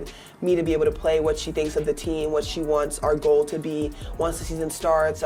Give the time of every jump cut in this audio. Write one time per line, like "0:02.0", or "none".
none